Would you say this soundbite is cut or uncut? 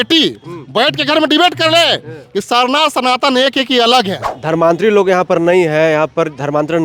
cut